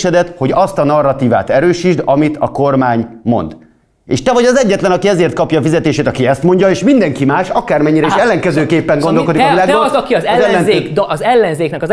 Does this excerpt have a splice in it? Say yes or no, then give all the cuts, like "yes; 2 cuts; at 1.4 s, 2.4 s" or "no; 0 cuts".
no; 0 cuts